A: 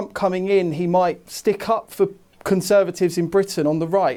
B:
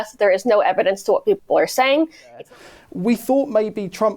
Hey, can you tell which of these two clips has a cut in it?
B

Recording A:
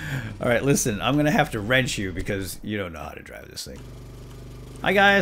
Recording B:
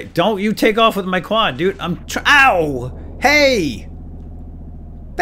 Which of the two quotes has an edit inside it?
A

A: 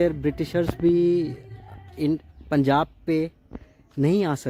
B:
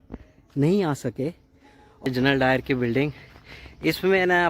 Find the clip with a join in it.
B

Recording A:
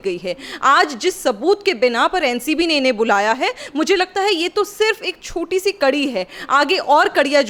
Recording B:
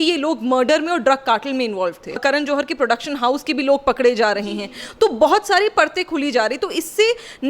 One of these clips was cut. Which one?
B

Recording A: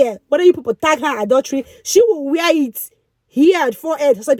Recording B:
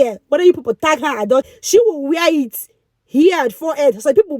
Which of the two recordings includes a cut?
B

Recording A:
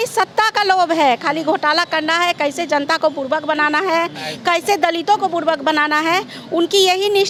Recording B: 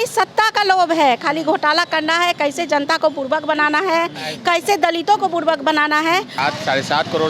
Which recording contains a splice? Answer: B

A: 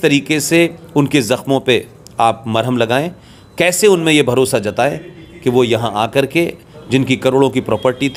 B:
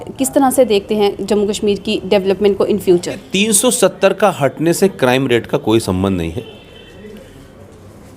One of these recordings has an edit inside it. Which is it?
B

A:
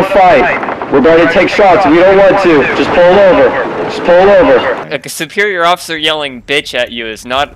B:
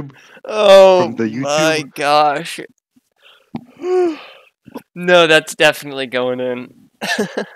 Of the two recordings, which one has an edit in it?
A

